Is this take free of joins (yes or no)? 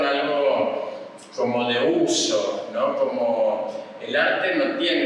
yes